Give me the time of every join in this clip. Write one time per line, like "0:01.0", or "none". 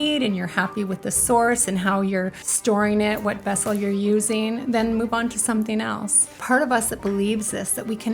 0:02.4
0:06.4